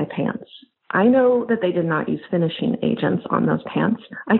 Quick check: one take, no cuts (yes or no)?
yes